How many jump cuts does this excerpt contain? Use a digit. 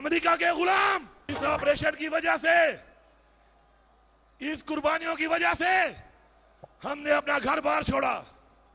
1